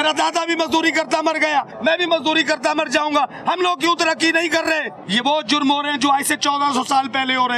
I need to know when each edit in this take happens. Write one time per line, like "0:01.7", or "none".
0:01.7
0:04.9

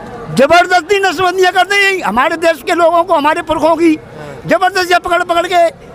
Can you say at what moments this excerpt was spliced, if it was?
none

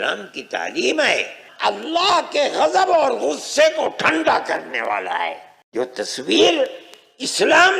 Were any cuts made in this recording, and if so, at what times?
0:01.4
0:05.5

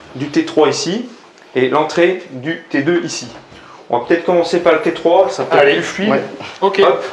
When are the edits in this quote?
none

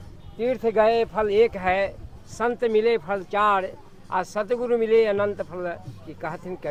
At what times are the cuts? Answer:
none

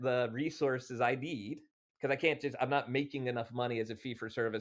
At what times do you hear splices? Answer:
0:01.9

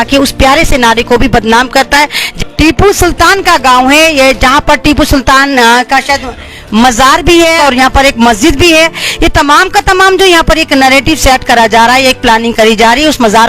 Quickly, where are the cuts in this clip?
0:02.2
0:07.6

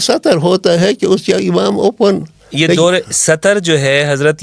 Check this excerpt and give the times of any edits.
none

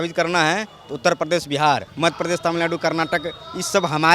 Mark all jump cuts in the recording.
0:01.9

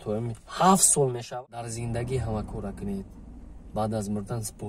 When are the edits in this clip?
0:01.2

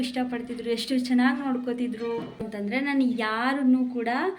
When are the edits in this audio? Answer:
0:02.5

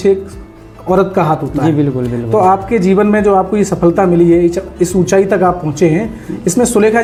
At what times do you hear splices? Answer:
none

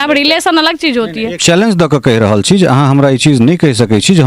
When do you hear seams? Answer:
0:01.4

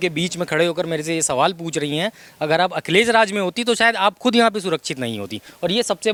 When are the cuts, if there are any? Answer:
none

